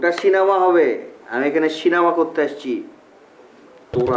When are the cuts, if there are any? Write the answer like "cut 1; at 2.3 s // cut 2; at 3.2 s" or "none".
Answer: none

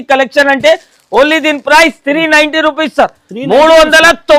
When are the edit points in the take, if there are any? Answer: none

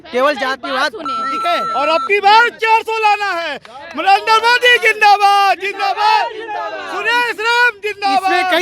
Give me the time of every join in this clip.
cut 1; at 1.4 s

